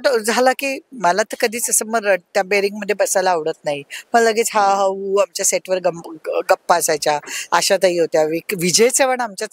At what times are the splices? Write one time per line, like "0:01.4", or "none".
none

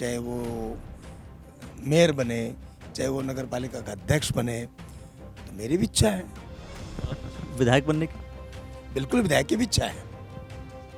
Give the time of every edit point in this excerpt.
none

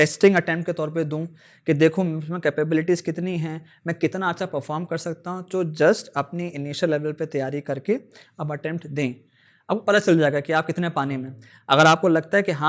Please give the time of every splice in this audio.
none

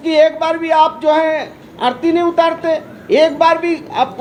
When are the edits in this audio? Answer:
none

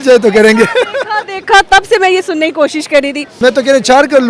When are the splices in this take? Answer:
0:03.4

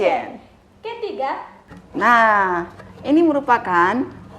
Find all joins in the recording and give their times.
0:01.5

